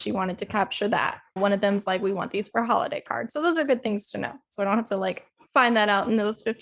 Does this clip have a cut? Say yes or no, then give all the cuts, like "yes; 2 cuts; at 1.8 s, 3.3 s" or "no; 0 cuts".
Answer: no; 0 cuts